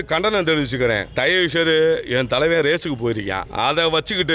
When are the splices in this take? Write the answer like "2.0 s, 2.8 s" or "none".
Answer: 1.1 s, 3.5 s